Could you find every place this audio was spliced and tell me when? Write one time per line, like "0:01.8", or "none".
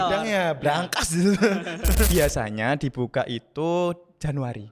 0:02.1